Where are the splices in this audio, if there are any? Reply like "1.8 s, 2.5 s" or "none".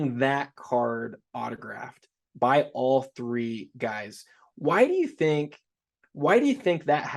none